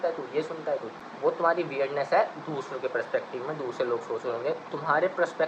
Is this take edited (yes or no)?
yes